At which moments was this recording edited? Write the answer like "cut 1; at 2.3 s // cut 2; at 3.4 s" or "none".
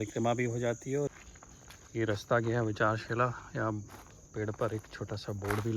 cut 1; at 1.1 s